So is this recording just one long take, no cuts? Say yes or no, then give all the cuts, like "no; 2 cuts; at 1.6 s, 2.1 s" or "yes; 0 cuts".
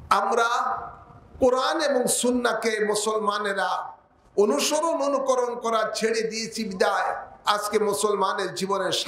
yes; 0 cuts